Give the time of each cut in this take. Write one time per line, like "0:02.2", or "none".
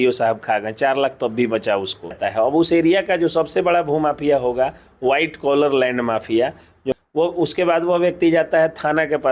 0:02.2
0:06.7